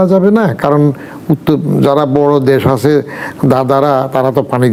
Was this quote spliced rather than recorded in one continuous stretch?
no; 0 cuts

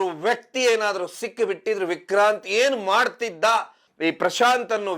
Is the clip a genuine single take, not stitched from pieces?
no; 1 cut; at 3.8 s

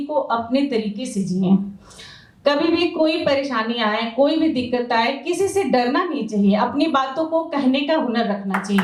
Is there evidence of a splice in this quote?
no; 0 cuts

